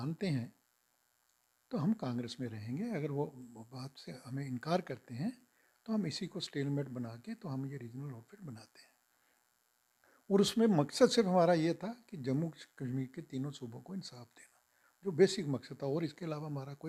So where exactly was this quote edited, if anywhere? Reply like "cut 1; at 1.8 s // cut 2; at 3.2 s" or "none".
none